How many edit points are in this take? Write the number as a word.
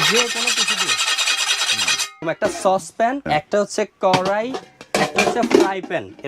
two